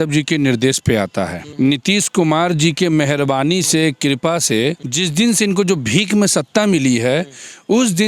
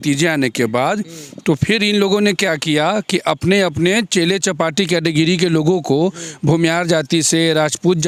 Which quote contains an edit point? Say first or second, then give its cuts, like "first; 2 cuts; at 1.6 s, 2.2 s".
first; 2 cuts; at 1.4 s, 4.9 s